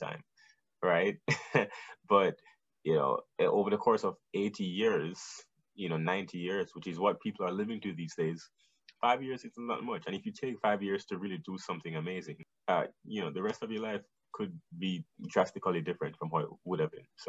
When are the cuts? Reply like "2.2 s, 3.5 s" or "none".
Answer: 12.4 s, 14.2 s